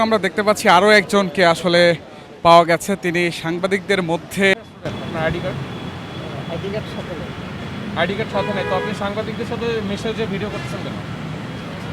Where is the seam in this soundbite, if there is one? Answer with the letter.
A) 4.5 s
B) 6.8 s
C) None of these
A